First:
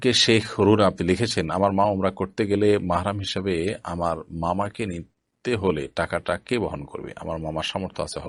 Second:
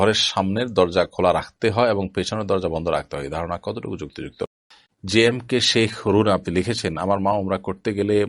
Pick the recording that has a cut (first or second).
second